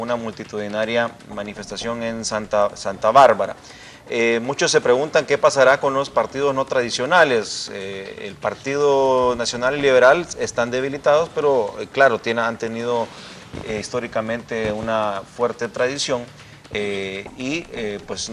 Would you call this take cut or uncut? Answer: cut